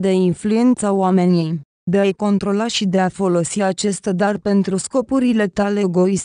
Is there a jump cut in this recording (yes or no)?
no